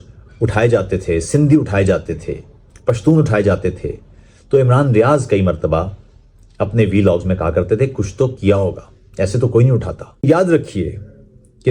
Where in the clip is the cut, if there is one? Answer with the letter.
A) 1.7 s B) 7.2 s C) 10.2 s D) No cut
C